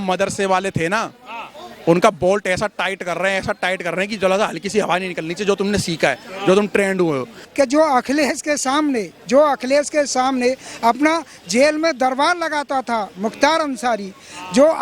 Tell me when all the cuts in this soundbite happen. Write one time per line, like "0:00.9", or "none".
0:07.4